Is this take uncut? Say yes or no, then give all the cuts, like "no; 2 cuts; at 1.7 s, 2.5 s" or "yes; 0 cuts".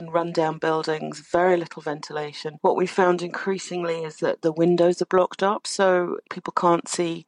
yes; 0 cuts